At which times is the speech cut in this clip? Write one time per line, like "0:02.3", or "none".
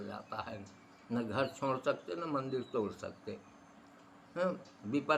none